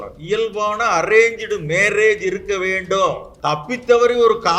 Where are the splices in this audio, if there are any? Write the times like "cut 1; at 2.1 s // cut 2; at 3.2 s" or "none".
cut 1; at 3.3 s